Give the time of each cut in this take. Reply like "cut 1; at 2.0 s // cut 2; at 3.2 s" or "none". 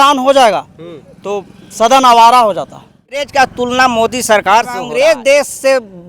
cut 1; at 3.3 s // cut 2; at 4.8 s